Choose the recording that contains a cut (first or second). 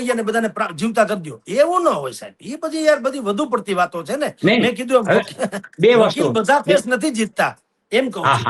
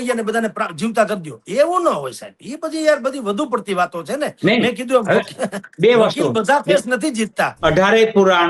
second